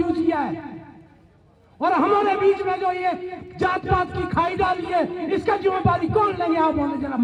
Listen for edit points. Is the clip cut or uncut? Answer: uncut